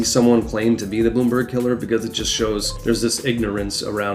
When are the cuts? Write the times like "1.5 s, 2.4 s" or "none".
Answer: 2.7 s